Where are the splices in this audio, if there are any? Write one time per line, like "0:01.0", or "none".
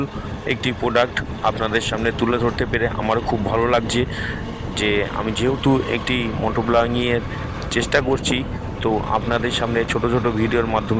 none

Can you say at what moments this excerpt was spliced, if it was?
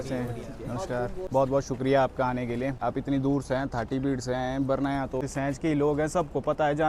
0:01.2
0:02.8
0:05.3

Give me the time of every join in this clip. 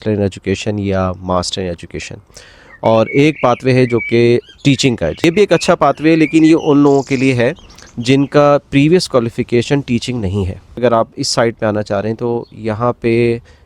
0:05.2
0:10.8

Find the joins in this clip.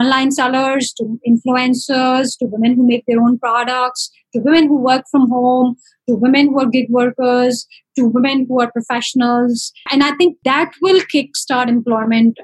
0:10.1

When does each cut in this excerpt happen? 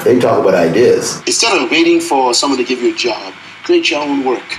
0:01.2

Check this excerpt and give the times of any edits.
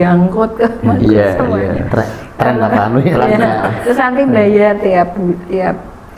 none

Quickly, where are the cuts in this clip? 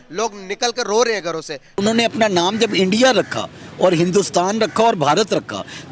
0:01.8

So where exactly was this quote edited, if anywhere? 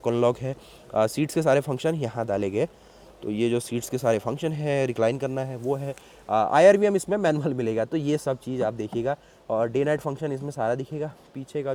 none

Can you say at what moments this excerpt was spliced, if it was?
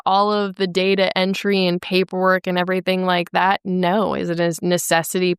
none

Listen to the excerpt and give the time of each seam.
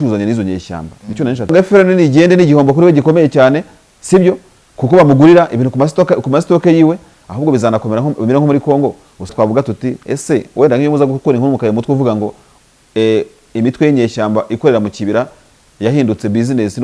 0:01.5
0:09.3

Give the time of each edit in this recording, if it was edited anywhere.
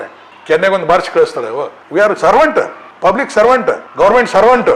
0:01.8

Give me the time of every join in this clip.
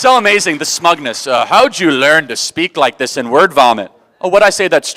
none

